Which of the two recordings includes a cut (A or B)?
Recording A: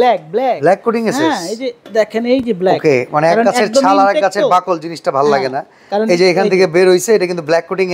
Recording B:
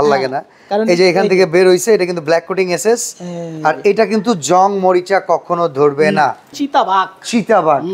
B